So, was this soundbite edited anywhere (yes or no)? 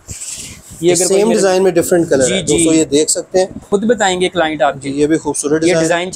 yes